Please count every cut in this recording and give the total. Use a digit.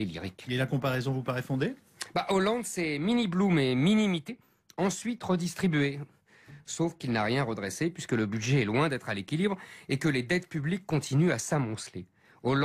0